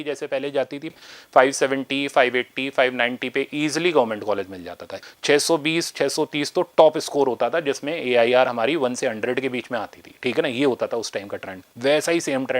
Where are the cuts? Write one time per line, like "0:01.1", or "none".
0:00.9
0:05.0